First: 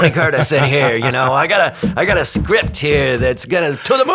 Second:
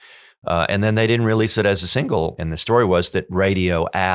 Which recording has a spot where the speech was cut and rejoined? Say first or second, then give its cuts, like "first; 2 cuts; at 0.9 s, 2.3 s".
second; 1 cut; at 2.4 s